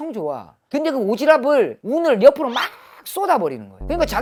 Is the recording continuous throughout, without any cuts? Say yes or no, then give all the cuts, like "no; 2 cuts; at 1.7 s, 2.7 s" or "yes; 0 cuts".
yes; 0 cuts